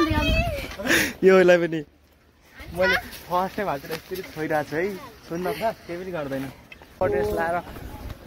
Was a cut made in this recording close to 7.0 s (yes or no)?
yes